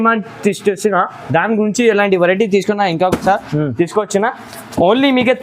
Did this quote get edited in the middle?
no; 0 cuts

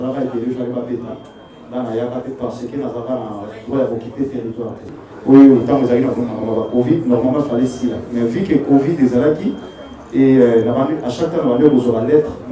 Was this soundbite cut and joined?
yes; 1 cut; at 5.1 s

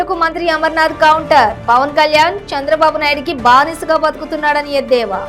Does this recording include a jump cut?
no; 0 cuts

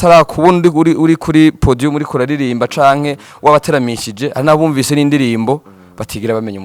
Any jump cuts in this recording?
no; 0 cuts

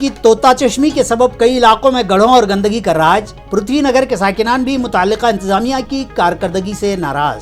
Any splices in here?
no; 0 cuts

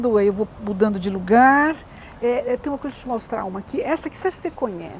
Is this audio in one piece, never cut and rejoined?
yes; 0 cuts

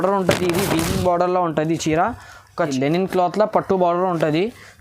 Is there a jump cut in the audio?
yes; 1 cut; at 2.7 s

